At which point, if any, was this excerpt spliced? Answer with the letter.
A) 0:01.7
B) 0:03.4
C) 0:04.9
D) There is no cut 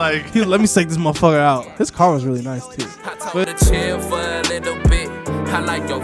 B